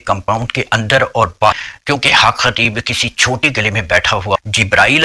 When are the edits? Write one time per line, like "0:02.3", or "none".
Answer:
0:01.6
0:04.4